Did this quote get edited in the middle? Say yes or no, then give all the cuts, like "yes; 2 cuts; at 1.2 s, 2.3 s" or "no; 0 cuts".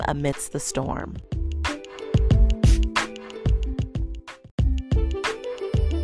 yes; 2 cuts; at 1.2 s, 4.4 s